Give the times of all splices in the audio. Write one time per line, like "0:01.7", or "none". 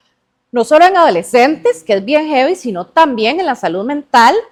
none